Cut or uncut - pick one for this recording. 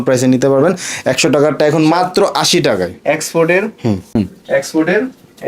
cut